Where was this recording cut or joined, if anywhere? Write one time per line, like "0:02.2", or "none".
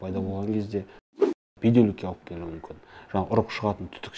0:00.9